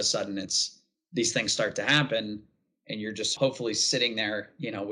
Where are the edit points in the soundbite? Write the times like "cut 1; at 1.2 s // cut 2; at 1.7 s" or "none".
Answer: cut 1; at 3.3 s